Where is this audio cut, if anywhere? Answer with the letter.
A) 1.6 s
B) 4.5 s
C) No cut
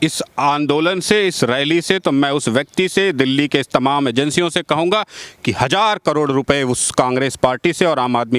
C